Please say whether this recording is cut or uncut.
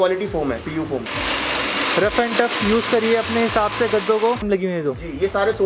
cut